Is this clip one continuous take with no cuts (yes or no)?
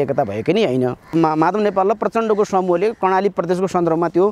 no